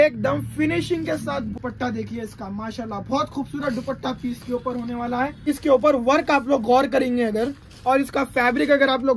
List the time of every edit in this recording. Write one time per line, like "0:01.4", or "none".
0:01.6
0:05.5